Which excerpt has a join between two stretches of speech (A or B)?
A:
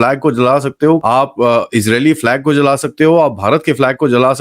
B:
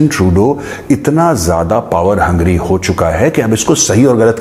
A